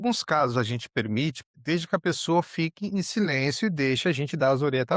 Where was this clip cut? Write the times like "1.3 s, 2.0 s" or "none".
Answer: 1.5 s